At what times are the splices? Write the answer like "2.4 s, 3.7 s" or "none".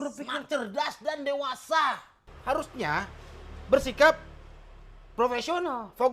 2.3 s